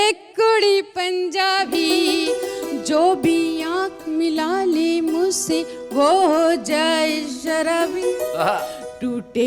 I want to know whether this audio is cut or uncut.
uncut